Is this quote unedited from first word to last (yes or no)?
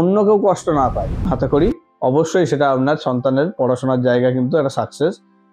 no